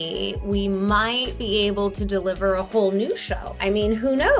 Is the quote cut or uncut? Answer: uncut